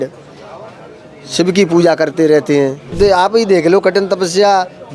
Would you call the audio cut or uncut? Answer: cut